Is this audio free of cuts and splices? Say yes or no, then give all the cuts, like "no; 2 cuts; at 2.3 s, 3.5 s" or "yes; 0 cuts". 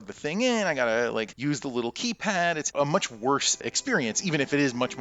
yes; 0 cuts